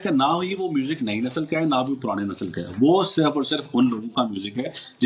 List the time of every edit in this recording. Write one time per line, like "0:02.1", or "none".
none